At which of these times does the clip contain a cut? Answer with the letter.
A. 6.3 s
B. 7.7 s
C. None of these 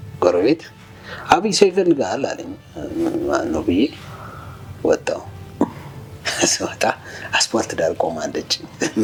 C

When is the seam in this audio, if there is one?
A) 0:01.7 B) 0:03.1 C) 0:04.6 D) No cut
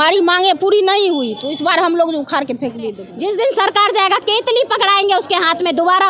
B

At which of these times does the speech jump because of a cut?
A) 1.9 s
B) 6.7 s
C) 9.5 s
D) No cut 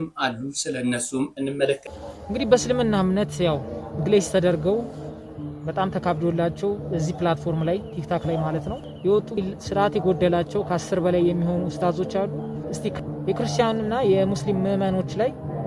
A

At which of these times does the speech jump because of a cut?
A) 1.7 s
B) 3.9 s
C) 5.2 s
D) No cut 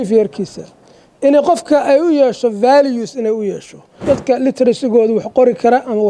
B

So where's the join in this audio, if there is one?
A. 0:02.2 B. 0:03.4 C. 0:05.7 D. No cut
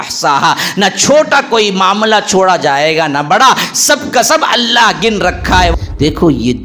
C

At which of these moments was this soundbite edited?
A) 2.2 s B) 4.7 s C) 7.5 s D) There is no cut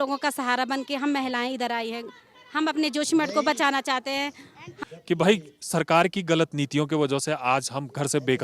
B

